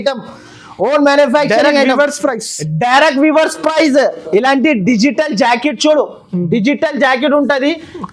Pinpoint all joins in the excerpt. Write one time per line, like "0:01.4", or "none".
none